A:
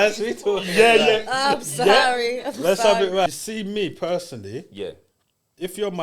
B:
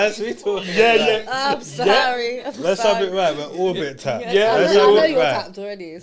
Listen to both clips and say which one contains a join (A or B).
A